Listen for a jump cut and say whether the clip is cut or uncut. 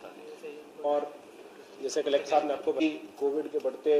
cut